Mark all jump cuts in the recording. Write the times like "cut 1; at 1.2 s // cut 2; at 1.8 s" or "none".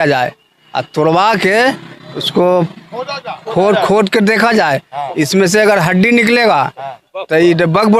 none

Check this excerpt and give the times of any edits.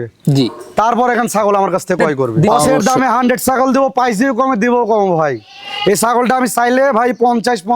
cut 1; at 2.3 s

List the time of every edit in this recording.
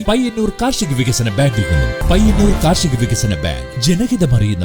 cut 1; at 2.0 s

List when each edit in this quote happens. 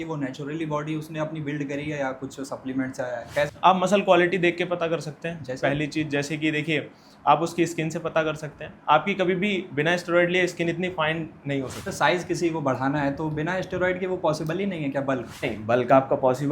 cut 1; at 3.5 s // cut 2; at 11.9 s // cut 3; at 15.5 s

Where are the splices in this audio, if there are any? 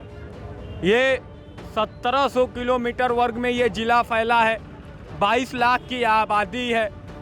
none

